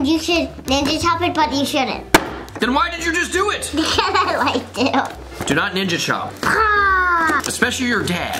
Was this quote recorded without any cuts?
no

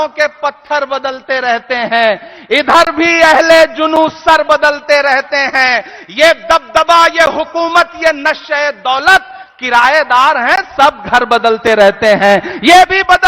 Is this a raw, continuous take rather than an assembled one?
yes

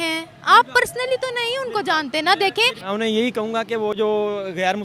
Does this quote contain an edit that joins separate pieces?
yes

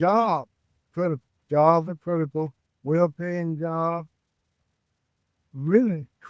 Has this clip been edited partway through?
no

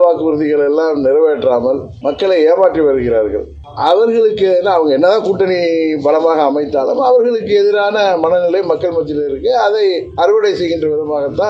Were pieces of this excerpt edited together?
no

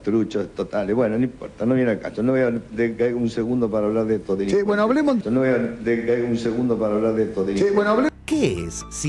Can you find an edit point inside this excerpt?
no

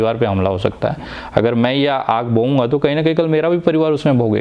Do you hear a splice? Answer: no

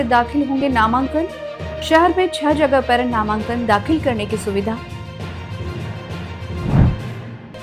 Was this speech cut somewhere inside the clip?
no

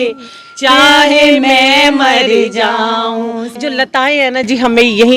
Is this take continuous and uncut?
no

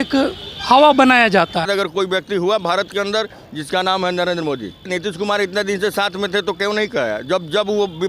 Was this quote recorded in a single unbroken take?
no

